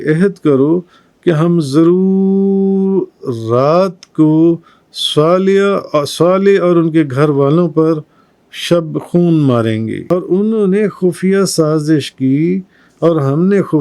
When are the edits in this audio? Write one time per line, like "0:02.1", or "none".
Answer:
0:10.0